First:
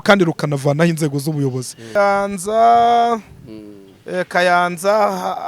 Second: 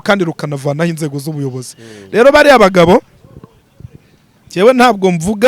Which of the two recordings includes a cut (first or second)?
first